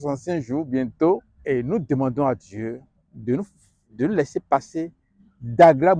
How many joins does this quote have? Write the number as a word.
one